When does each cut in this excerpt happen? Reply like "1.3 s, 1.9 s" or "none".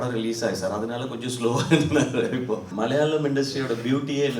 2.7 s